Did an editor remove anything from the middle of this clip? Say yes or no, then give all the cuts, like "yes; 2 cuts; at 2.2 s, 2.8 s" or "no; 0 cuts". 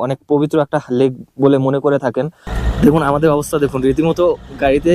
yes; 1 cut; at 2.5 s